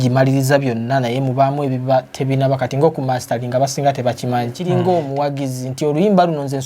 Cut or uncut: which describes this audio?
cut